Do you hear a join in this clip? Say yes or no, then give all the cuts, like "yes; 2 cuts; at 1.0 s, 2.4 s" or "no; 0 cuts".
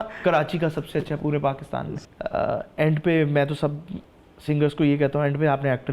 yes; 1 cut; at 1.9 s